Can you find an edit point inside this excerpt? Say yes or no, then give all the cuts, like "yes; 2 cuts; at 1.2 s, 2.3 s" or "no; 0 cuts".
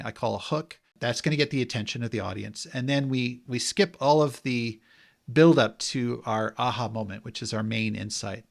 yes; 1 cut; at 1.0 s